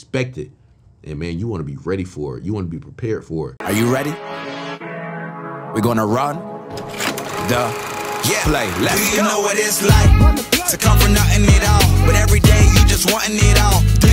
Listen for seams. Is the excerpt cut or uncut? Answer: cut